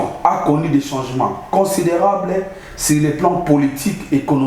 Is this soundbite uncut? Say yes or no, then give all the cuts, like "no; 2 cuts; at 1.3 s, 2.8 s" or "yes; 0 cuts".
yes; 0 cuts